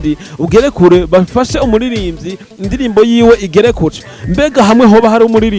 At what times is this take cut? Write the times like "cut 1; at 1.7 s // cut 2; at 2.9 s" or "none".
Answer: cut 1; at 3.9 s